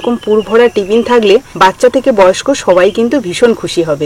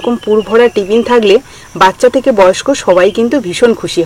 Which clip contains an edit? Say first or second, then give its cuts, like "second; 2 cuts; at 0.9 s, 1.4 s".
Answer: first; 1 cut; at 1.5 s